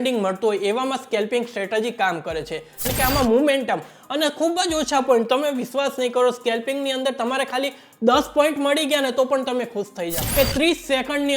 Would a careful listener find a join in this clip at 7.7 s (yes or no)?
no